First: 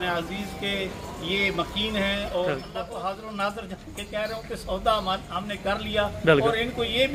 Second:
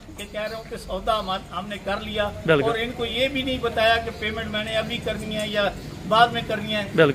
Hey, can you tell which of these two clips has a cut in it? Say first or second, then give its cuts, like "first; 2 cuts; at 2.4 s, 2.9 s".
first; 1 cut; at 2.7 s